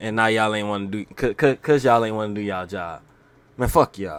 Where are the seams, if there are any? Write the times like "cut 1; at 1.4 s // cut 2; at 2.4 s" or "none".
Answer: none